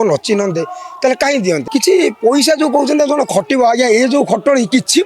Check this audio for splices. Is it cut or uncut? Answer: cut